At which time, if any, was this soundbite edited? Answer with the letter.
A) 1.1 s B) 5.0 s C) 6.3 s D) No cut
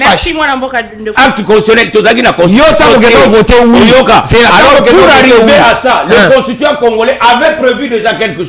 A